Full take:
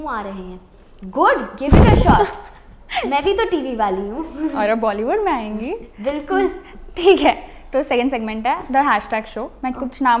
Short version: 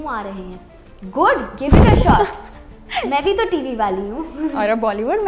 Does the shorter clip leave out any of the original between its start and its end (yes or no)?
no